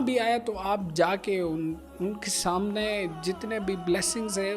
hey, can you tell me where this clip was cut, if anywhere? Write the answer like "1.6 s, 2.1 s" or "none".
none